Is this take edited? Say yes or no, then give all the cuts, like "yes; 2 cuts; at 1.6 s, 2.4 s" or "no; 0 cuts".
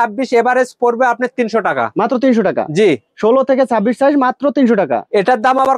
no; 0 cuts